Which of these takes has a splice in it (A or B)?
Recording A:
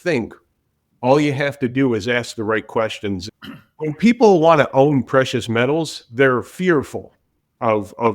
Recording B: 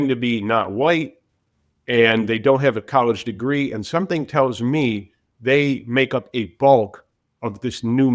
A